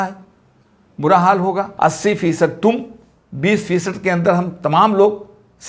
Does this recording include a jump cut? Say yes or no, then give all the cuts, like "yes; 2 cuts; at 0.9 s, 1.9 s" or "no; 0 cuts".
yes; 1 cut; at 1.7 s